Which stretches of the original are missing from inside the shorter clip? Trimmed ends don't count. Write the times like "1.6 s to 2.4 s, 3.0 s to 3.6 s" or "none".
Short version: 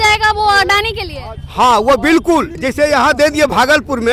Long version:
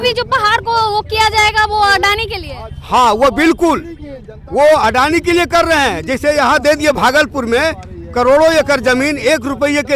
3.9 s to 6.1 s